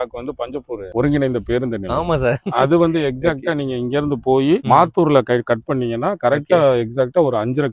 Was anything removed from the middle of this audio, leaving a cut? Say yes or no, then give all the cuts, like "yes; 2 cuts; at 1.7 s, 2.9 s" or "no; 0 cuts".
no; 0 cuts